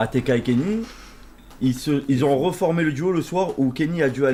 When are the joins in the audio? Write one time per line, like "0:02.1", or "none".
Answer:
none

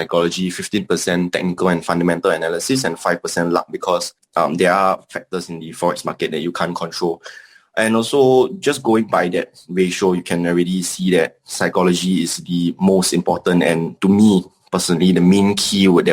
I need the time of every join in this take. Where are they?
0:04.2

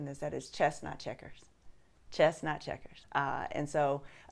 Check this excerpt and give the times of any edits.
0:01.9
0:03.3

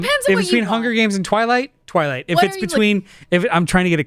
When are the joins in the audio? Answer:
none

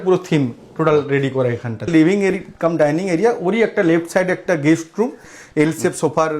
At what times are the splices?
0:01.9
0:05.3

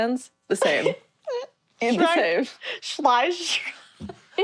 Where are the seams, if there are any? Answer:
none

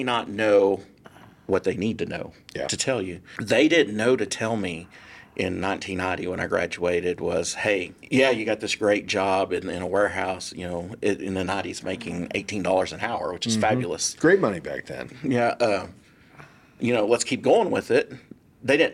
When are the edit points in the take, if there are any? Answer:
0:03.3
0:08.0

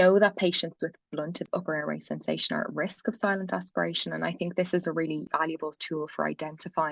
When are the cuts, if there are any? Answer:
0:01.5
0:05.3

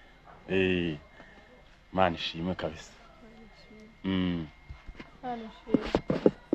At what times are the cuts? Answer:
none

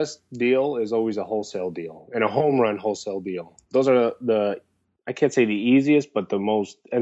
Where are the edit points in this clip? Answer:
0:03.5

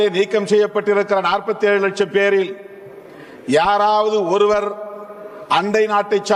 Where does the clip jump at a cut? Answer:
none

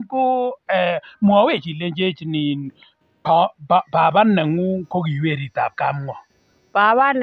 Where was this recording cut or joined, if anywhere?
none

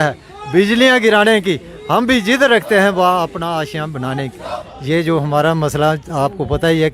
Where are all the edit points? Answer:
0:04.7

